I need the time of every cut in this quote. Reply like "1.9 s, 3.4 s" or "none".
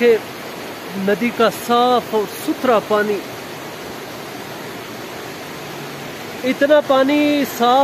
none